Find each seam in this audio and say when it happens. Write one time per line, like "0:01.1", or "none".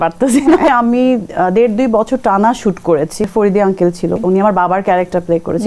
0:00.7
0:03.2
0:04.2